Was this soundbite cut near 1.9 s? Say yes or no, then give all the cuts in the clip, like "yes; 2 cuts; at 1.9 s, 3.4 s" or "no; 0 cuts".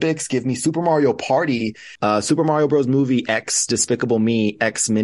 yes; 1 cut; at 1.9 s